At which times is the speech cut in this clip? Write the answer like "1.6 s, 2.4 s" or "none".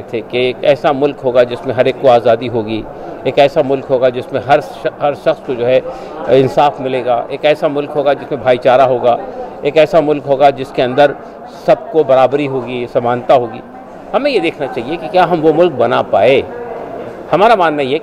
none